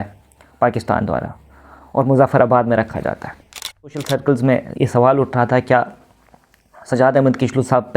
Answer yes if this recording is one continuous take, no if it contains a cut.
no